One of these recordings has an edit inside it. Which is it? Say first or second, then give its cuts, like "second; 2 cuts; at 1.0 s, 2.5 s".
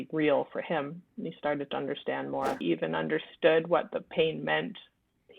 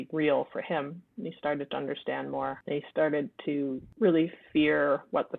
first; 1 cut; at 2.6 s